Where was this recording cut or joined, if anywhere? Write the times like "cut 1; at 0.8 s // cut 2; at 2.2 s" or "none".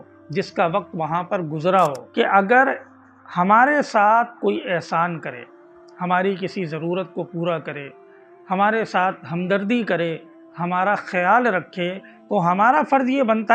cut 1; at 2.0 s